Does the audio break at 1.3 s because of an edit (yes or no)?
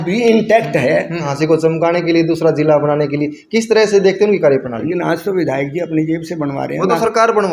yes